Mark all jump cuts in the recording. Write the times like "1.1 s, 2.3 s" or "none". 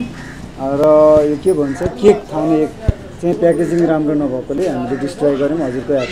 none